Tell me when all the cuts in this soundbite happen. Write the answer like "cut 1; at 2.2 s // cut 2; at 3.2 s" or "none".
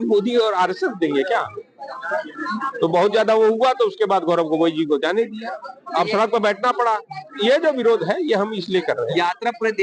none